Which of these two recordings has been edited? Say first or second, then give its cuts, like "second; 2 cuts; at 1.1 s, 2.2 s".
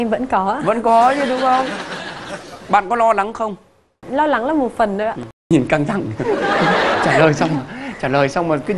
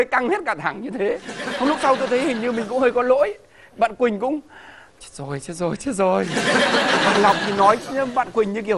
first; 2 cuts; at 4.0 s, 5.5 s